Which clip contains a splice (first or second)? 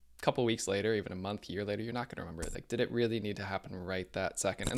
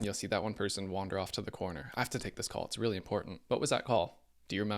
second